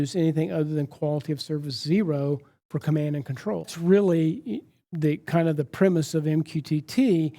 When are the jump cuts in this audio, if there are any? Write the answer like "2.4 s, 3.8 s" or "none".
3.7 s